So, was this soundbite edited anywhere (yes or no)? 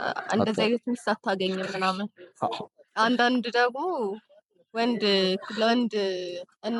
no